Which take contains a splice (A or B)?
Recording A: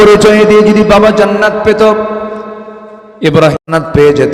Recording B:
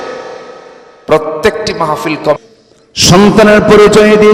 B